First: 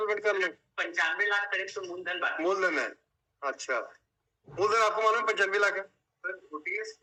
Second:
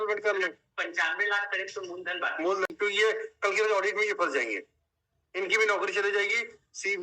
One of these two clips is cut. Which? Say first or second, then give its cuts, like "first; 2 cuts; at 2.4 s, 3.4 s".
second; 1 cut; at 2.7 s